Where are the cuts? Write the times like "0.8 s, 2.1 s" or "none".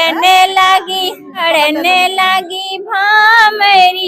1.4 s

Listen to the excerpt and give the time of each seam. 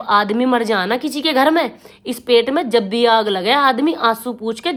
none

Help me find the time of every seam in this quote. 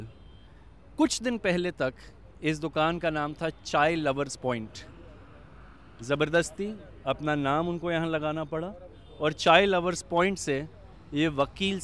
none

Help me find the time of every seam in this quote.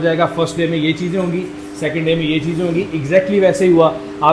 none

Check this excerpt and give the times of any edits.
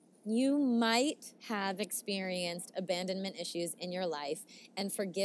none

